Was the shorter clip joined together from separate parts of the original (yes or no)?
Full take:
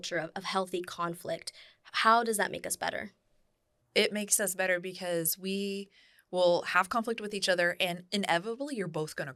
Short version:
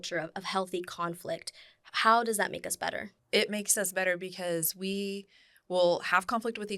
yes